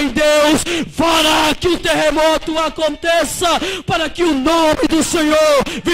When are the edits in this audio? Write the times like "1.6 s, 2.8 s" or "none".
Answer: none